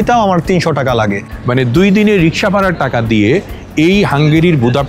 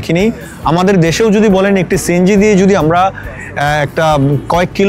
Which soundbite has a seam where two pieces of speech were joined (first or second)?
first